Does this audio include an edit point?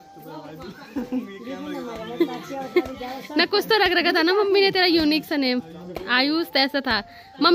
no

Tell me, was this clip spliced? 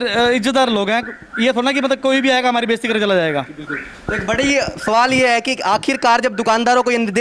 no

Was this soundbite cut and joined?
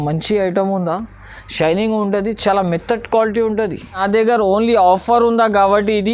yes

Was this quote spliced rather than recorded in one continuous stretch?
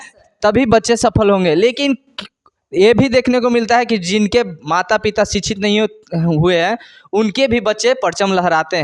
no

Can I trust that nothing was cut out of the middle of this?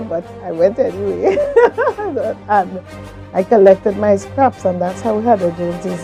yes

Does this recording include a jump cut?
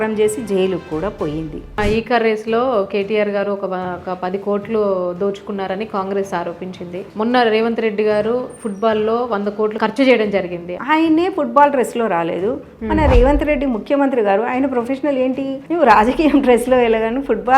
yes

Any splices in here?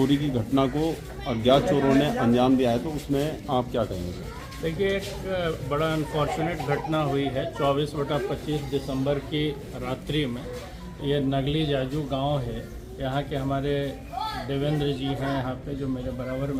no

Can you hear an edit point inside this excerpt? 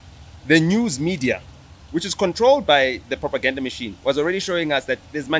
no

